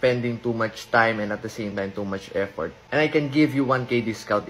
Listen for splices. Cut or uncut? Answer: cut